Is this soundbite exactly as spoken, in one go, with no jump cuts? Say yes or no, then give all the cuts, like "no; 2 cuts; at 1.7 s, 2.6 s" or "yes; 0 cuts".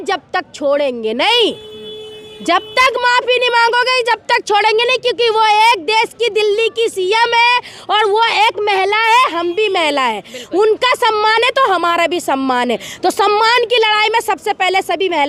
yes; 0 cuts